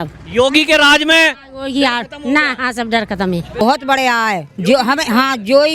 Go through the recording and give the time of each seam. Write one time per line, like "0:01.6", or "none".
0:03.6